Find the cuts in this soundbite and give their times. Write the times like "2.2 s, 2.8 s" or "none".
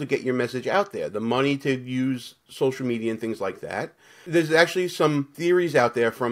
4.2 s, 5.3 s